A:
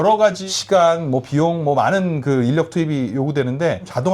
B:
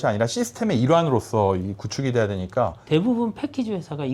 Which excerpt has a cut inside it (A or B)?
B